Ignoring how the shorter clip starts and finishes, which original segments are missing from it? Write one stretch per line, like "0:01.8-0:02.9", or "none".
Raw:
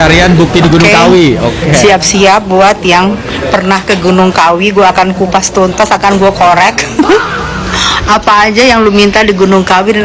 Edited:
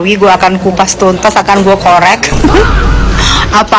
none